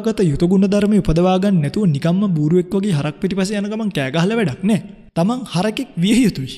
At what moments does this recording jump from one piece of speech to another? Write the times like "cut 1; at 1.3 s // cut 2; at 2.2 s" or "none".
cut 1; at 5.0 s